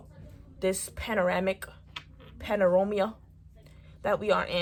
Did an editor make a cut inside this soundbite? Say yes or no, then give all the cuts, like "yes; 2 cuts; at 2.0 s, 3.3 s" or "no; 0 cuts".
no; 0 cuts